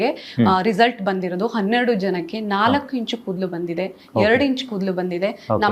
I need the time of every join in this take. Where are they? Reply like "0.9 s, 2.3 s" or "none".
none